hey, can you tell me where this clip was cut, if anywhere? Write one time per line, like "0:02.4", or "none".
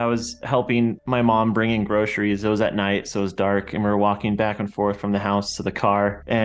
0:01.0